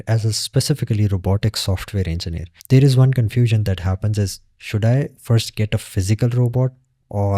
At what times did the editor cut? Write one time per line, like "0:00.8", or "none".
none